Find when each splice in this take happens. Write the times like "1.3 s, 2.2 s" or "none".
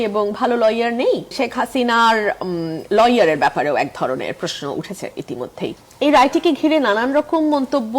1.3 s, 5.8 s